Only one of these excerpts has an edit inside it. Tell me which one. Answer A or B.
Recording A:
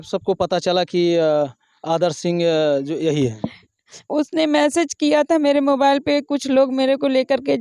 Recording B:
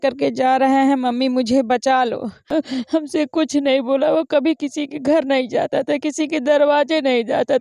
B